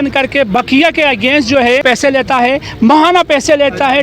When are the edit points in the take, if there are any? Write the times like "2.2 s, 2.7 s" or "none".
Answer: 1.9 s